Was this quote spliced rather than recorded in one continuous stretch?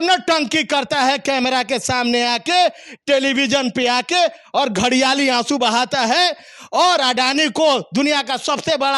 no; 0 cuts

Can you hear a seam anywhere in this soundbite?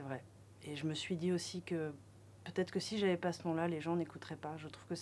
no; 0 cuts

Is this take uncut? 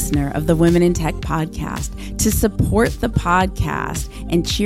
yes; 0 cuts

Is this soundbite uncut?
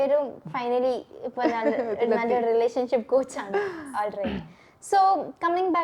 yes; 0 cuts

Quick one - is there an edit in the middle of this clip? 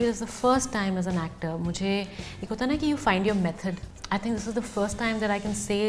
yes; 1 cut; at 3.9 s

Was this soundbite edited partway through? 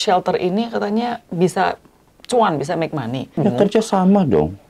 yes; 1 cut; at 3.4 s

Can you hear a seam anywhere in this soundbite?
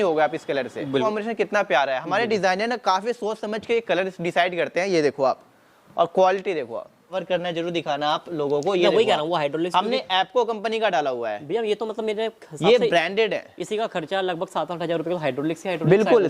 yes; 2 cuts; at 1.0 s, 7.2 s

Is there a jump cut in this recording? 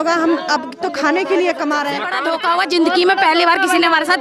yes; 1 cut; at 2.1 s

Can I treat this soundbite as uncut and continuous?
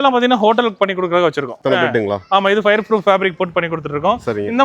no; 1 cut; at 1.5 s

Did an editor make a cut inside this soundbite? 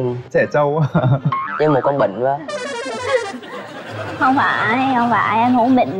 no; 0 cuts

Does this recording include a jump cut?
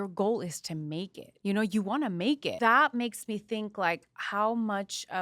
yes; 2 cuts; at 1.2 s, 2.5 s

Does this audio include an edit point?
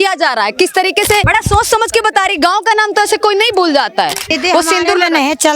yes; 2 cuts; at 1.2 s, 4.3 s

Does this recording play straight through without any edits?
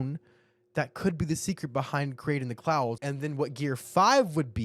no; 1 cut; at 3.0 s

